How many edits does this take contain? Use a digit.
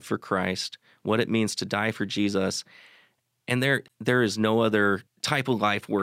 2